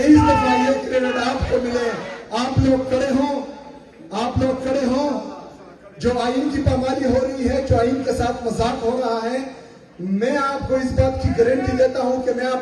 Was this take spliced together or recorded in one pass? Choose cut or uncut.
uncut